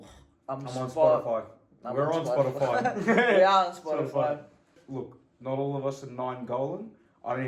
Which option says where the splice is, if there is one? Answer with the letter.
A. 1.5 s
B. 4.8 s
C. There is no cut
B